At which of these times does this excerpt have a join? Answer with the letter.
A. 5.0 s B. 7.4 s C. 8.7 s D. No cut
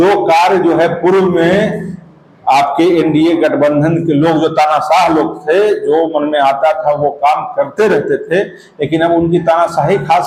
D